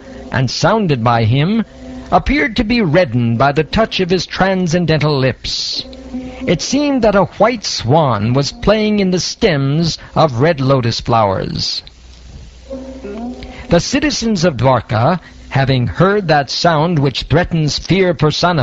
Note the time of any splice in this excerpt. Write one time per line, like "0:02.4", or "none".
0:10.3